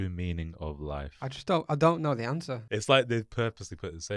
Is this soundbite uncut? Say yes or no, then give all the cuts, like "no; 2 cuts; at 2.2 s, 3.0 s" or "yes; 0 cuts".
no; 2 cuts; at 1.1 s, 2.6 s